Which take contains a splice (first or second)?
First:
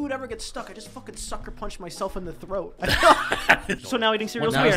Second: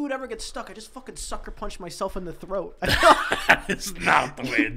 first